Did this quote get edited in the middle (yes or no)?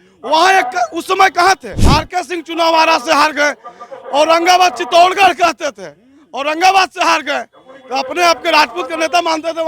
yes